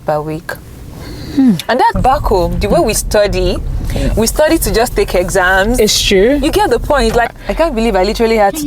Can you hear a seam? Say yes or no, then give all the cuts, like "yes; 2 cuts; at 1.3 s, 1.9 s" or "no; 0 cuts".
yes; 2 cuts; at 2.0 s, 7.4 s